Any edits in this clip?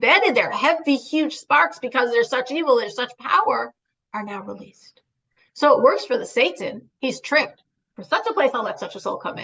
no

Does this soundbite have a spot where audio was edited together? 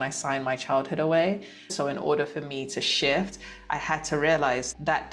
yes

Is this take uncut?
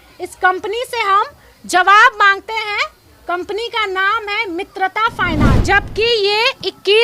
no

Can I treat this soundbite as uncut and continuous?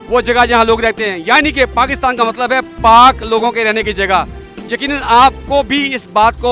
yes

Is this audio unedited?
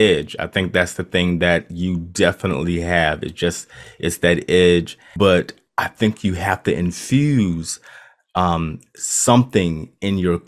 no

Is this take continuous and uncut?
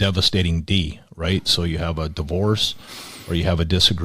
yes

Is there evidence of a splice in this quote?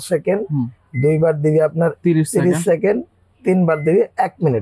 no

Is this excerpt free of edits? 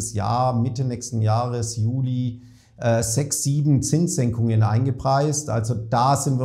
yes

